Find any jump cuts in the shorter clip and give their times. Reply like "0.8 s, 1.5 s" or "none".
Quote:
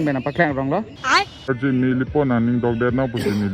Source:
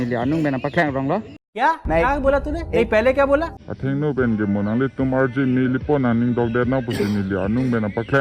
1.3 s